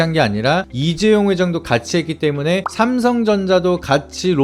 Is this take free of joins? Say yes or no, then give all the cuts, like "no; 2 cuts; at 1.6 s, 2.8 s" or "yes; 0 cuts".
yes; 0 cuts